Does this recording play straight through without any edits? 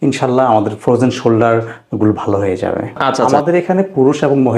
no; 1 cut; at 3.2 s

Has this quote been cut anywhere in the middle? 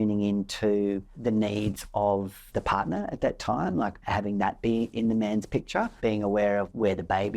yes; 5 cuts; at 1.1 s, 2.4 s, 4.0 s, 4.9 s, 5.9 s

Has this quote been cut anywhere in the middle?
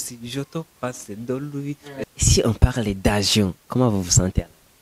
yes; 1 cut; at 2.1 s

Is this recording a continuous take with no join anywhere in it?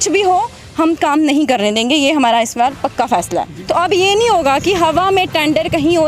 no; 1 cut; at 3.5 s

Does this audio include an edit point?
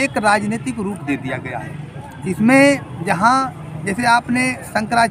no; 0 cuts

